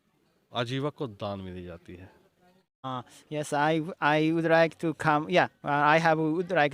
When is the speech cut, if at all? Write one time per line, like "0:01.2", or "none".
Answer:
0:02.9